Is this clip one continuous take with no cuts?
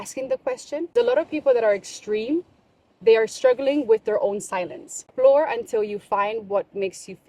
no; 2 cuts; at 0.9 s, 5.0 s

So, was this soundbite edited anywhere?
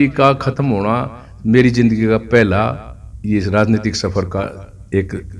no; 0 cuts

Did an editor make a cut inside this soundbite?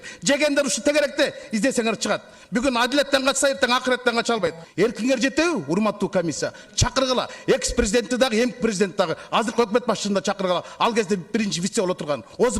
yes; 1 cut; at 4.6 s

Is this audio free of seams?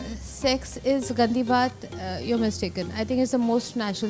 yes; 0 cuts

